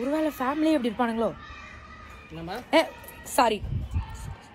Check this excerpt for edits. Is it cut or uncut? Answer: uncut